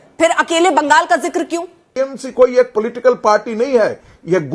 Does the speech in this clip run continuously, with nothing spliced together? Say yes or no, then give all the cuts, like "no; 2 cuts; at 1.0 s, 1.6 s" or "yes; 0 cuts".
no; 1 cut; at 1.8 s